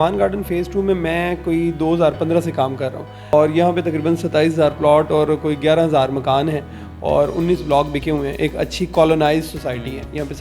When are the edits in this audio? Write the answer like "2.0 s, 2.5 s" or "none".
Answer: 3.3 s